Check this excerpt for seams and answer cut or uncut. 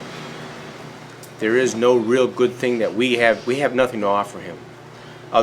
cut